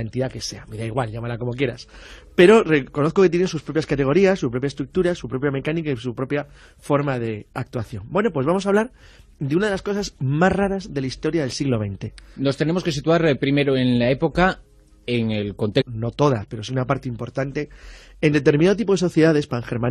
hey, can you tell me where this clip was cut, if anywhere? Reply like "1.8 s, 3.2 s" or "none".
none